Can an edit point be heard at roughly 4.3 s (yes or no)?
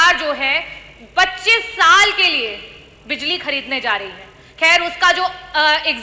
no